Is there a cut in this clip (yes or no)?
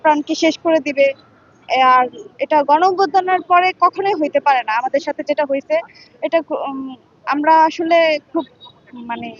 no